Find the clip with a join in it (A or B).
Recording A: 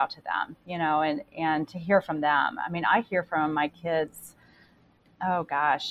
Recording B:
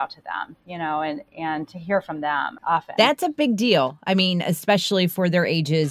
B